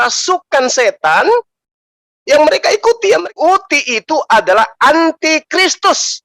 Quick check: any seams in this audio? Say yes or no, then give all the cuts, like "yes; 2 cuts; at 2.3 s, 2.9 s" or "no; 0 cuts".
yes; 1 cut; at 3.4 s